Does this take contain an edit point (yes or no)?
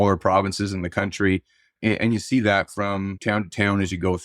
yes